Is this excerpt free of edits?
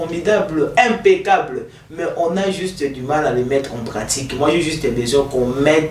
yes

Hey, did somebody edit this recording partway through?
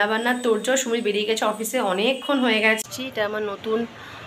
yes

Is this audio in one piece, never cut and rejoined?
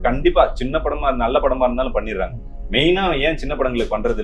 yes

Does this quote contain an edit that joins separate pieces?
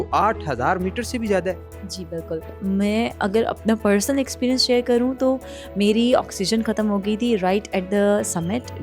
yes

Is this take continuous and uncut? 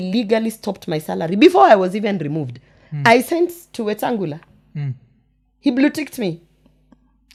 yes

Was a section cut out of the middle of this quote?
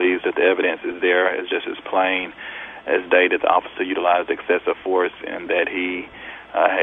no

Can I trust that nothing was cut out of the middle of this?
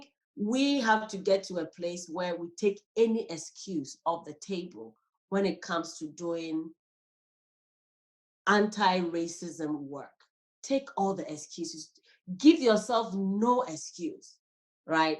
yes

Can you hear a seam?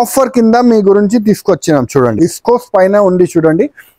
yes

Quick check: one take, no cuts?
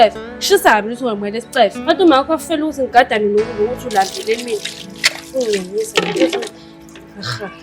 no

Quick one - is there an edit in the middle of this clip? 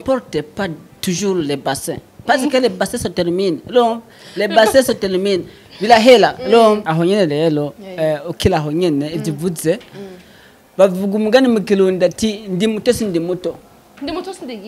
yes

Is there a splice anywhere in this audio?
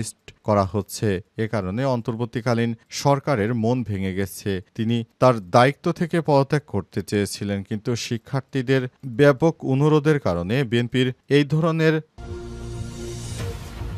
yes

